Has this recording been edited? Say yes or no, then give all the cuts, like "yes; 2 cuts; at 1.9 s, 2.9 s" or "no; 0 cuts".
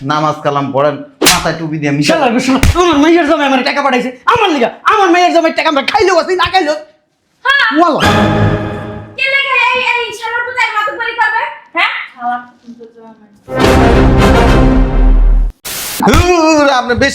yes; 1 cut; at 16.0 s